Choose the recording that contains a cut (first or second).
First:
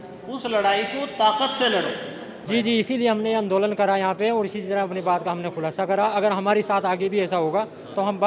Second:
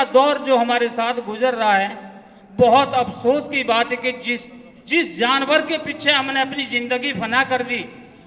first